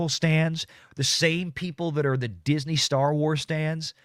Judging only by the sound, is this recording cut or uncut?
uncut